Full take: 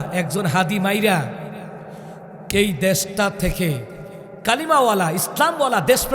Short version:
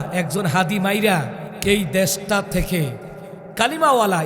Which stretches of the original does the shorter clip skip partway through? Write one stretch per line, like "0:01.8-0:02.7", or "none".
0:01.4-0:02.3